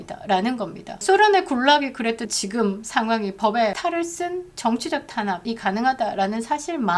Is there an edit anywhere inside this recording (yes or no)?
yes